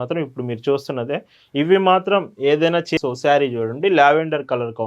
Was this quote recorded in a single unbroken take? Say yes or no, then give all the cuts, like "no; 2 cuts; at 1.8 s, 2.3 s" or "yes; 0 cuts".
no; 1 cut; at 2.9 s